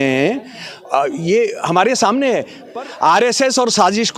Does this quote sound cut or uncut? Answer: cut